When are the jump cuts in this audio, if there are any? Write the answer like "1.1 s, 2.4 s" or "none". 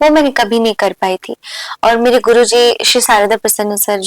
none